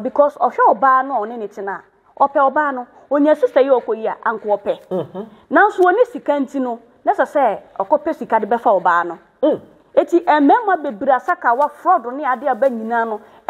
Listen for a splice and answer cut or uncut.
uncut